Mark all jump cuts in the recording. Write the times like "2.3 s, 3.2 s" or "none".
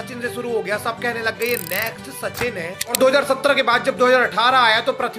2.8 s